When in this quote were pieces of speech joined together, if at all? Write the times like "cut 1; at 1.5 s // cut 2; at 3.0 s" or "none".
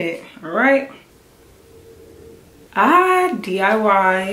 cut 1; at 2.6 s